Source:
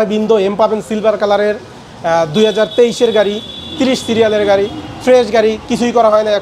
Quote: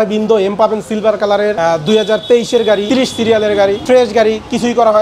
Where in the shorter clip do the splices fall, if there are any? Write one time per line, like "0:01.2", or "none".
0:01.6
0:02.8
0:03.8